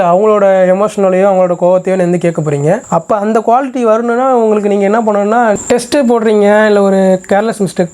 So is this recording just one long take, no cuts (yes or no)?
no